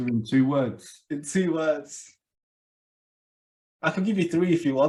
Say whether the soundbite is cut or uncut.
uncut